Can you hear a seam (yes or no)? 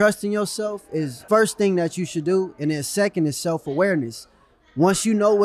yes